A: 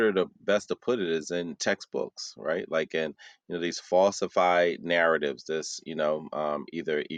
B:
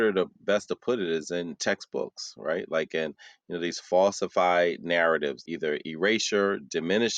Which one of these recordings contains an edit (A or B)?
B